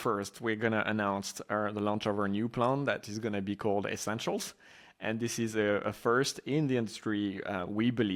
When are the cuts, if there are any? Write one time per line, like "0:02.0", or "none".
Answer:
none